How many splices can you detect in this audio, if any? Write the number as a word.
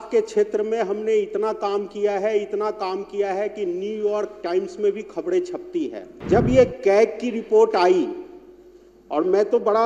one